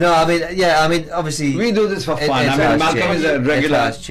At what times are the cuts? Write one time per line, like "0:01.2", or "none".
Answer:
0:02.7

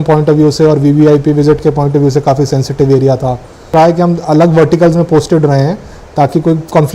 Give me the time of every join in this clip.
0:03.7

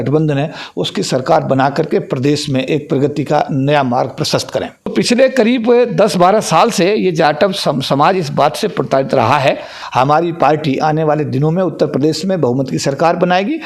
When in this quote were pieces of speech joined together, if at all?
0:04.9
0:09.7

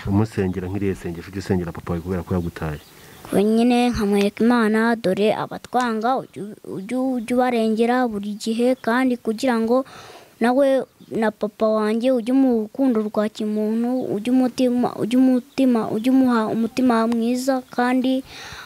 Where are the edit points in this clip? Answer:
none

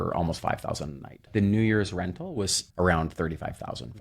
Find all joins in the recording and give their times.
0:01.3
0:02.6

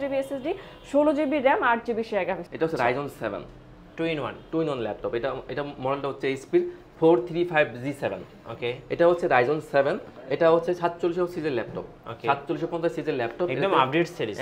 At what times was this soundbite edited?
0:02.4

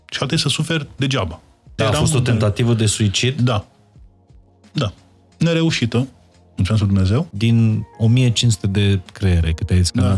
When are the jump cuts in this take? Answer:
0:01.8
0:07.3

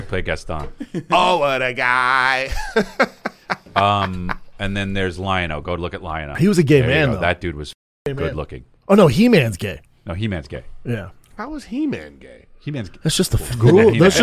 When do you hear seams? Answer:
0:06.3

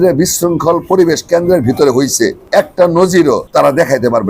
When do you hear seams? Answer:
0:02.4
0:03.4

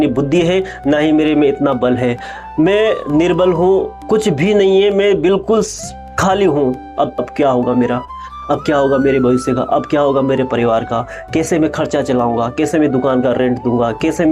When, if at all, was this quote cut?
0:04.0
0:07.3

